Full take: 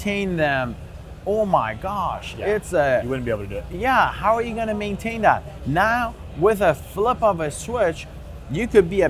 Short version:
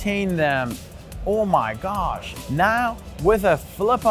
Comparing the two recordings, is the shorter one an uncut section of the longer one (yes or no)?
no